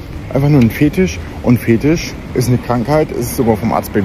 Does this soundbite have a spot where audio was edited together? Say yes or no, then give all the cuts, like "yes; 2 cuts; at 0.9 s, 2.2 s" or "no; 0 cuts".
no; 0 cuts